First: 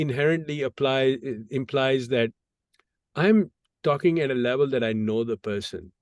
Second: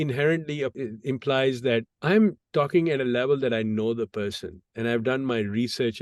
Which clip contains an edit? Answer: second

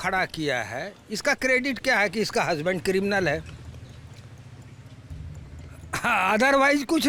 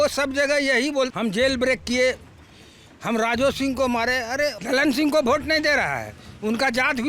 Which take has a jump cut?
second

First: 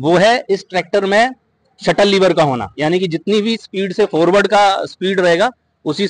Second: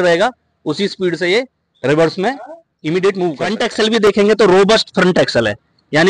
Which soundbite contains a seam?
second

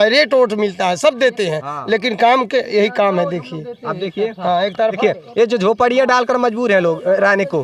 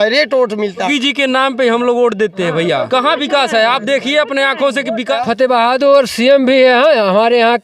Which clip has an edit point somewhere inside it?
second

